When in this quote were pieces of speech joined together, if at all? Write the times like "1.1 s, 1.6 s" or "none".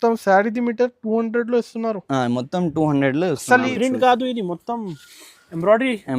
3.7 s

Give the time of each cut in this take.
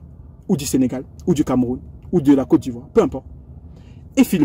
none

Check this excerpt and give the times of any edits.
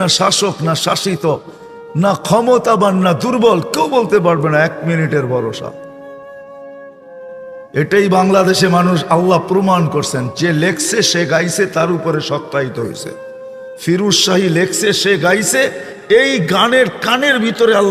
15.5 s

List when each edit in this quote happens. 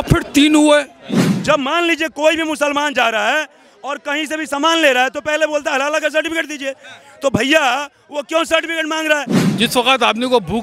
1.3 s, 9.4 s

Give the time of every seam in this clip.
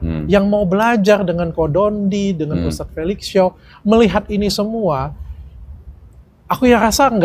none

